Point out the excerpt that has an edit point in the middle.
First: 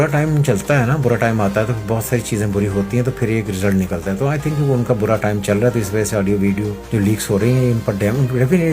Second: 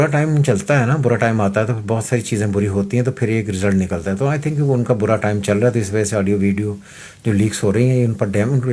first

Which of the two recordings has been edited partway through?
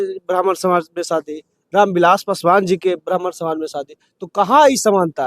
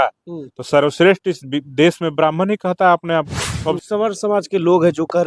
second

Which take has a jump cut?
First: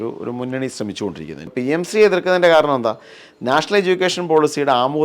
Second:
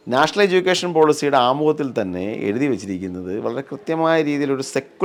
first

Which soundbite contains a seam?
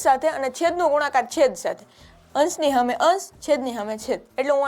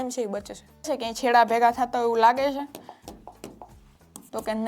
second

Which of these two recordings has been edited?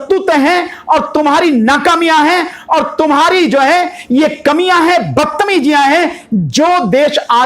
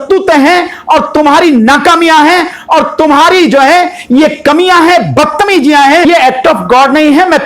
second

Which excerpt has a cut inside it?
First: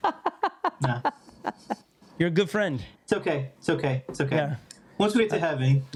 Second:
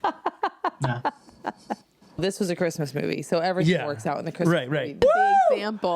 second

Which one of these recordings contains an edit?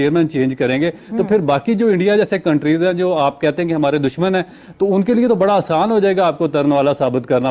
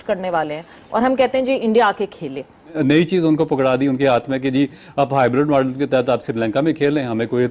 second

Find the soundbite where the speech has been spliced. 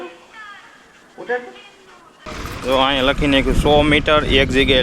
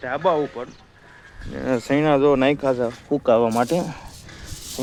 first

